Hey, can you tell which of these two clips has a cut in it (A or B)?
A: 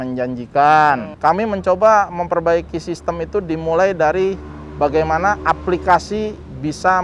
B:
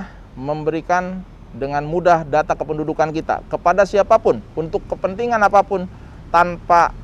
A